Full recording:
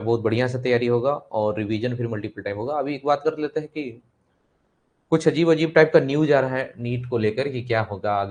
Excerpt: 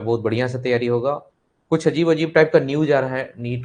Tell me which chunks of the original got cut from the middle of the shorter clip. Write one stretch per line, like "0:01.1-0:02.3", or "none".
0:01.2-0:04.6

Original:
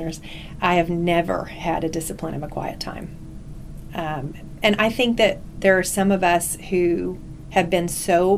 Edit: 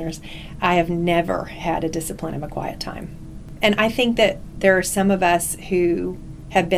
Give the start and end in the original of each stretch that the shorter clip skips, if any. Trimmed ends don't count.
0:03.4-0:04.4

